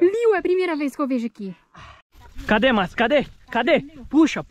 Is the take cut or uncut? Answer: cut